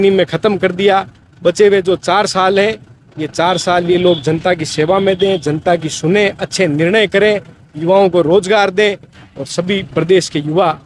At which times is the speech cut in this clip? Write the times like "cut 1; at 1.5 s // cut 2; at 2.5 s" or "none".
cut 1; at 9.1 s